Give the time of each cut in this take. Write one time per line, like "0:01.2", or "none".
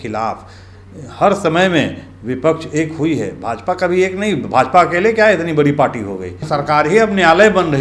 0:06.5